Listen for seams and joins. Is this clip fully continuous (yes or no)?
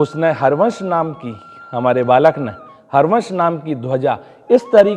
yes